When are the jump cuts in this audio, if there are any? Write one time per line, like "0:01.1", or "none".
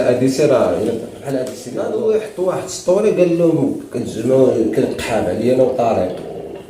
0:01.6

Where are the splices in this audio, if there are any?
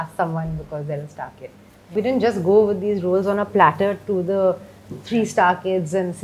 0:01.9

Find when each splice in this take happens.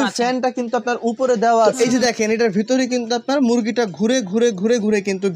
0:01.7

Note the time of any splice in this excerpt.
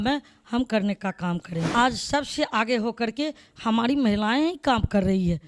0:01.7

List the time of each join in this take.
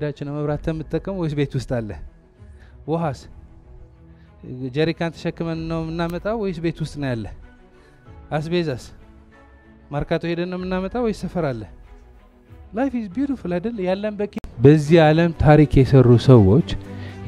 0:14.4

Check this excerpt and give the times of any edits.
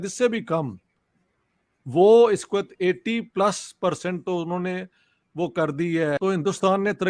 0:06.2

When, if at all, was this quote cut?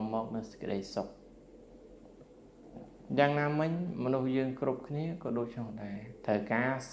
0:02.4

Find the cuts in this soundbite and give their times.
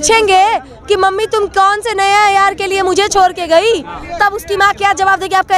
none

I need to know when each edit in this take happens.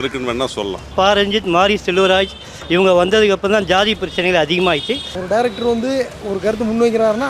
0:00.9
0:05.1

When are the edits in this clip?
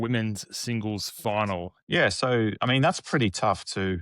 0:01.7

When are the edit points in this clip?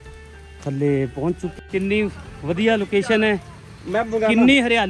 0:01.5

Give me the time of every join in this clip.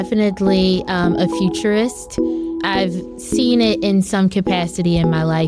0:02.5

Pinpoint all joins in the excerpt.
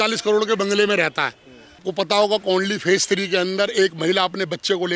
0:01.9

